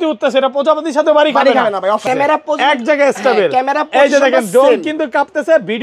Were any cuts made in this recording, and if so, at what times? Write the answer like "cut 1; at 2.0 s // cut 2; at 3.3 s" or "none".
cut 1; at 2.0 s